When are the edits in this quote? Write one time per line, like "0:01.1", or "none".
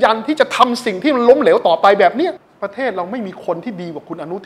0:02.5